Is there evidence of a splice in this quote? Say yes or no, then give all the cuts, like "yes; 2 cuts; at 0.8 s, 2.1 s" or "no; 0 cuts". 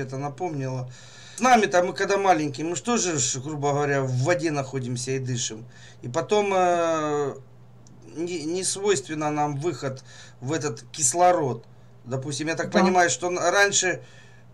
no; 0 cuts